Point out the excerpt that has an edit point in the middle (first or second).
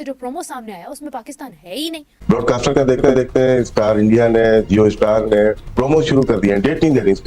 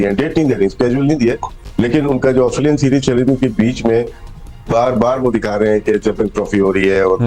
first